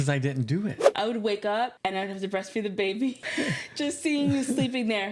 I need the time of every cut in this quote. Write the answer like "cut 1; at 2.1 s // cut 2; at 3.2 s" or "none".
cut 1; at 0.9 s // cut 2; at 1.8 s // cut 3; at 3.2 s

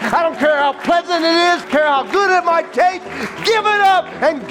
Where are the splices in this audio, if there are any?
cut 1; at 1.6 s

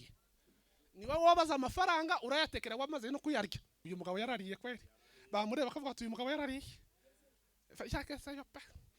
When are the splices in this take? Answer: cut 1; at 3.8 s

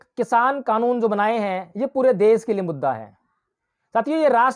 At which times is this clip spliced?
none

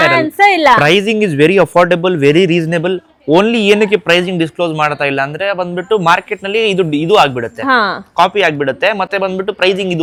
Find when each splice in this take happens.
none

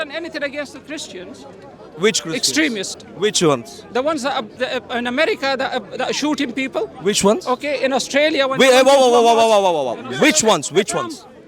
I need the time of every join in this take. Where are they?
none

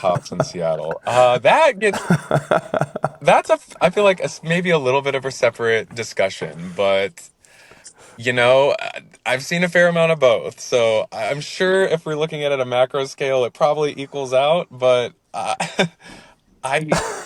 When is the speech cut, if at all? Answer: none

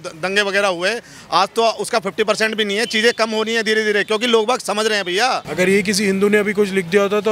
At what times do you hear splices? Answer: cut 1; at 5.5 s

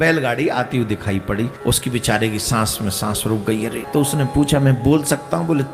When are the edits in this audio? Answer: cut 1; at 1.5 s // cut 2; at 3.8 s

